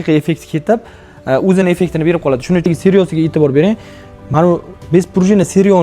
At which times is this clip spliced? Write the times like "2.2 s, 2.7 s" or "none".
2.7 s